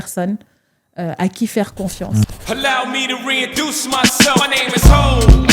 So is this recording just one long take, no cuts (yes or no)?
no